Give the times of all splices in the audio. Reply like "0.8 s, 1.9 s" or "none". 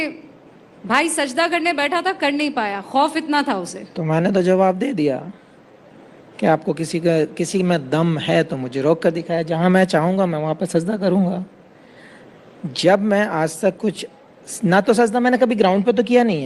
none